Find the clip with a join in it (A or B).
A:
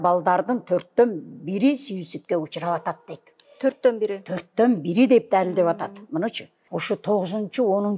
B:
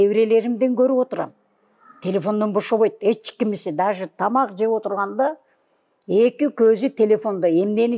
A